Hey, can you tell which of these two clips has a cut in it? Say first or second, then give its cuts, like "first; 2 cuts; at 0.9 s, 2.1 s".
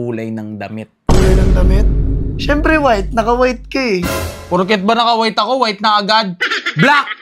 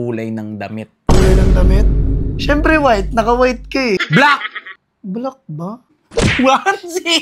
second; 2 cuts; at 4.0 s, 6.0 s